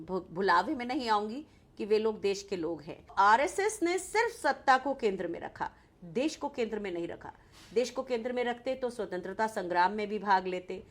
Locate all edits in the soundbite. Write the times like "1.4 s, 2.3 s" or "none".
3.1 s